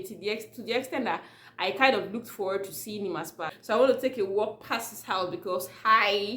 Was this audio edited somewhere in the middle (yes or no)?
yes